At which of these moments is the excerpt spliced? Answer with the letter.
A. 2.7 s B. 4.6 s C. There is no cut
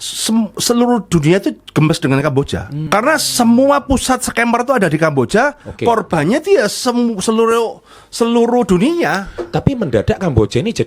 A